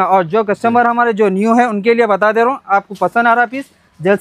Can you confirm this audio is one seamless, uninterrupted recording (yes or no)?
yes